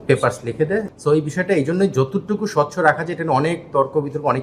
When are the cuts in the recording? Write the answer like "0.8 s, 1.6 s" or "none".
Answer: 0.9 s